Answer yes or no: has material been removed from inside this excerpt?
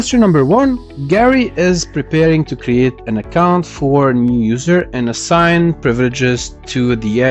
yes